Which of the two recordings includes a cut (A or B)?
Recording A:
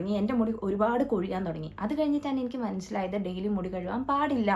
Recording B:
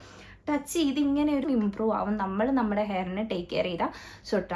B